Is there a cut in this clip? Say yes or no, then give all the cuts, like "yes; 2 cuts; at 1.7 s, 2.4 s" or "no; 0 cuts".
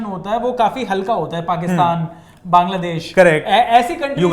no; 0 cuts